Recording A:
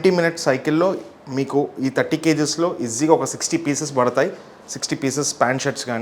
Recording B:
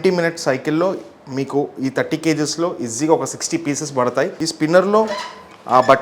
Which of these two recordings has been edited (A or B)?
B